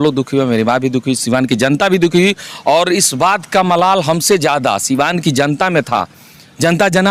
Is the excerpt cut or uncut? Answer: uncut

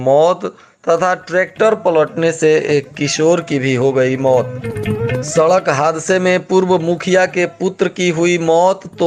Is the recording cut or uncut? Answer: uncut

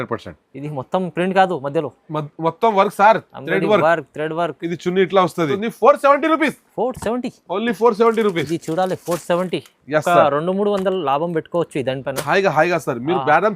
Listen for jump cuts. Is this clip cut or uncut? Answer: cut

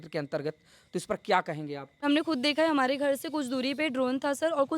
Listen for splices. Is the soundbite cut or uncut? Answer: cut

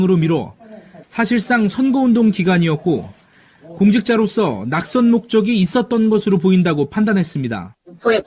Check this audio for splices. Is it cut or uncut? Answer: cut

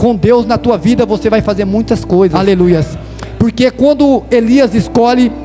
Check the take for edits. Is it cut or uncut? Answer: cut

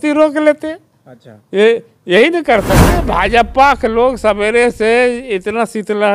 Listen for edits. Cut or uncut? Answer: cut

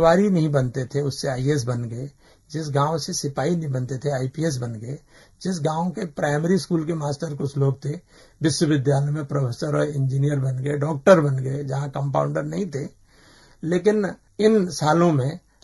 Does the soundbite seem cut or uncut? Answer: uncut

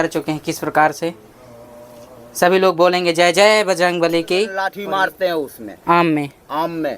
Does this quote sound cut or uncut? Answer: cut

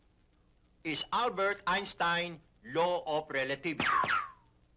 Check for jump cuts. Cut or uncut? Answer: uncut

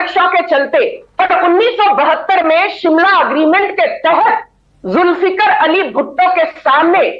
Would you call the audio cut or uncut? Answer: uncut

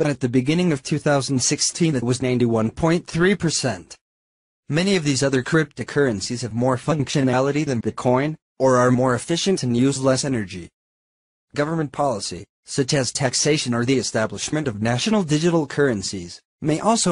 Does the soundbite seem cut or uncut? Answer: uncut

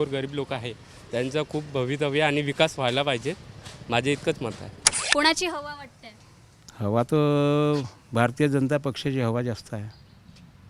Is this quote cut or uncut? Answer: cut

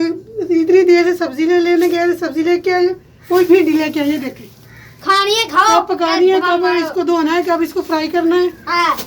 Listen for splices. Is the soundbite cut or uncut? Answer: uncut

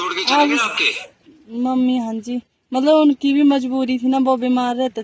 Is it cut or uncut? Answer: uncut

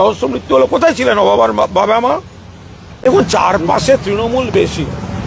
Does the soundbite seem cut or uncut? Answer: cut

